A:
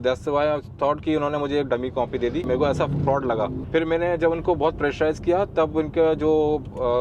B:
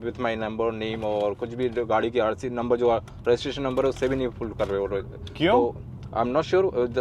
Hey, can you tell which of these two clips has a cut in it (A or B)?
A